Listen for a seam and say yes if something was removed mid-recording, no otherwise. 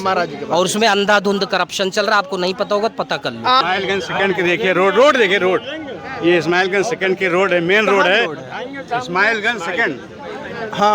yes